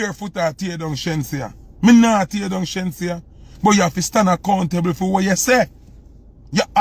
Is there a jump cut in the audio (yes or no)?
no